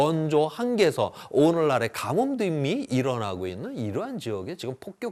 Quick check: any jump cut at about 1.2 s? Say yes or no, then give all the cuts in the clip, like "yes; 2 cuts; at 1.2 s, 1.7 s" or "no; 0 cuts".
no; 0 cuts